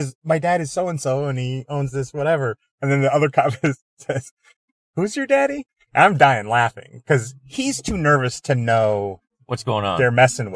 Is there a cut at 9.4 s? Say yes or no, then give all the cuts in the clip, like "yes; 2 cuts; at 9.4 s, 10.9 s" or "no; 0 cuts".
no; 0 cuts